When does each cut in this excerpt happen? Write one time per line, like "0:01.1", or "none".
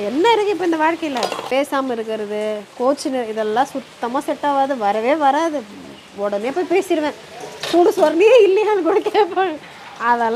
0:01.5